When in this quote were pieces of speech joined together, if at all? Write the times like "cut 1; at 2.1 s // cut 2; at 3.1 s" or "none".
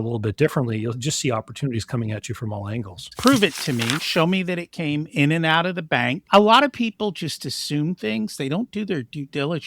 cut 1; at 3.1 s // cut 2; at 6.2 s